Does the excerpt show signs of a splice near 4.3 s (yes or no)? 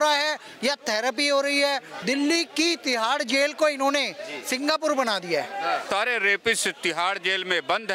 no